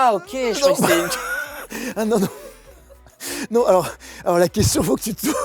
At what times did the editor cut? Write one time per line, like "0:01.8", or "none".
none